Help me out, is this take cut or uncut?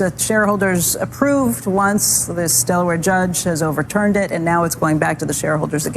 uncut